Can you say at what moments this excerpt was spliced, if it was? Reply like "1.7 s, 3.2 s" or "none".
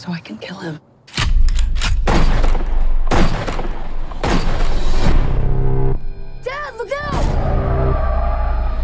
none